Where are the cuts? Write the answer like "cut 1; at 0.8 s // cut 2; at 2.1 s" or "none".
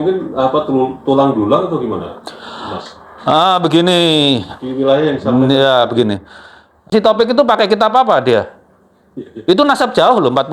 cut 1; at 6.8 s